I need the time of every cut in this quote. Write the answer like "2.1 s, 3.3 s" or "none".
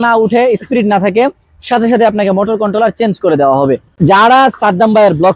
3.9 s